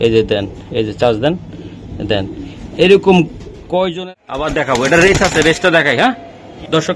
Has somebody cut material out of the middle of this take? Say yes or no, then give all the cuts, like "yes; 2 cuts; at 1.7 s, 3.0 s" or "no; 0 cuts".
yes; 1 cut; at 3.9 s